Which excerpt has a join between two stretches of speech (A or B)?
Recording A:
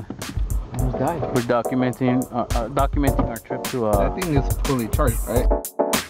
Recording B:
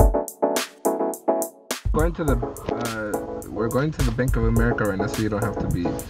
B